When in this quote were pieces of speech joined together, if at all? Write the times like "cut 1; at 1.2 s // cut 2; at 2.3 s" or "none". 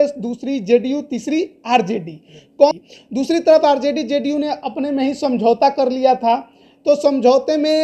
cut 1; at 2.7 s